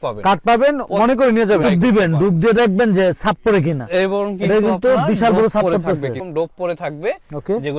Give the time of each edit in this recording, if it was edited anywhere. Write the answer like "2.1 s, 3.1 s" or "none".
1.6 s, 6.2 s